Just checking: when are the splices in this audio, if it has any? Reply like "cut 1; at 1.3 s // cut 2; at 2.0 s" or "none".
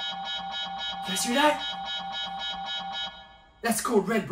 cut 1; at 1.1 s